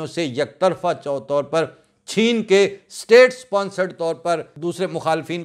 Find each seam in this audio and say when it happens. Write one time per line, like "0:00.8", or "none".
0:04.5